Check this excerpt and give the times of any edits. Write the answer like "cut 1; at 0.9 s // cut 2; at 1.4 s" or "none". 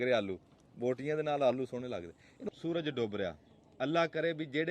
cut 1; at 2.3 s